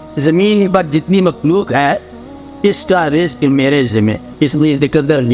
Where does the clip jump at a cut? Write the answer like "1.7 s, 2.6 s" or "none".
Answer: 4.2 s